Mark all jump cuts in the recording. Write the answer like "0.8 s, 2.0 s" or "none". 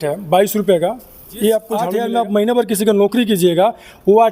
1.9 s